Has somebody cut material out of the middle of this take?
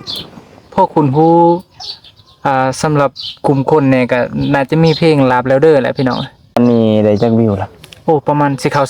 yes; 1 cut; at 6.6 s

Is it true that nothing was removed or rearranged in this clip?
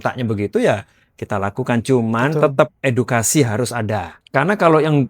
no; 1 cut; at 4.1 s

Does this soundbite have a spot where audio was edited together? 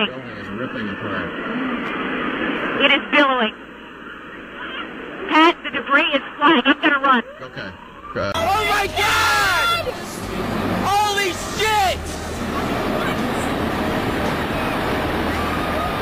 yes; 1 cut; at 1.4 s

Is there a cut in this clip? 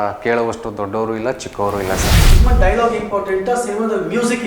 yes; 1 cut; at 2.2 s

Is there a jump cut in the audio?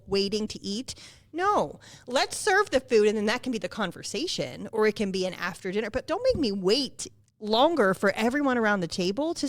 yes; 1 cut; at 6.0 s

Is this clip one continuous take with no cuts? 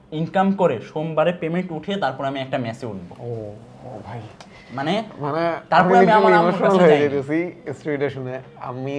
yes; 0 cuts

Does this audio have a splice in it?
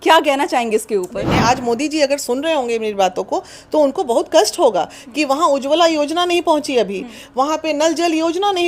yes; 1 cut; at 1.2 s

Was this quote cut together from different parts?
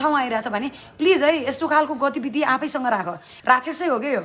yes; 1 cut; at 3.3 s

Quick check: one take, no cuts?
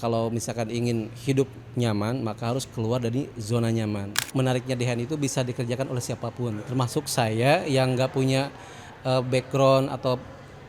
no; 1 cut; at 4.1 s

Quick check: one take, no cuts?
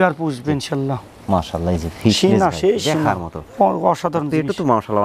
yes; 0 cuts

